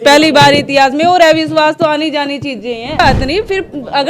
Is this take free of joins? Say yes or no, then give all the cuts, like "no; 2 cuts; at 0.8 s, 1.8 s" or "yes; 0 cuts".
no; 1 cut; at 3.0 s